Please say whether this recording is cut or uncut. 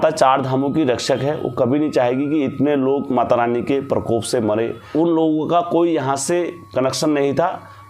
cut